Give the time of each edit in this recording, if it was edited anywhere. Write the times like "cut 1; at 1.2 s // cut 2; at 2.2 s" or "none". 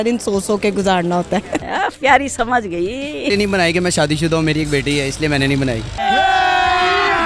cut 1; at 1.6 s // cut 2; at 3.3 s // cut 3; at 5.9 s